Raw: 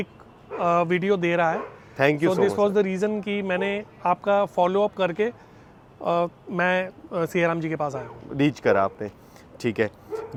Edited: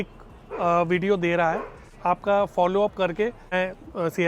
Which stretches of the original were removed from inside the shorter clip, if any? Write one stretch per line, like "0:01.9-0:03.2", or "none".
0:01.8-0:03.8
0:05.5-0:06.7